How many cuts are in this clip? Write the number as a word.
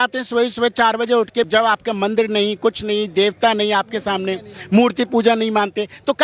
one